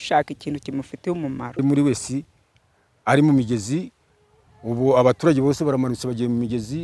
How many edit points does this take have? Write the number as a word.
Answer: one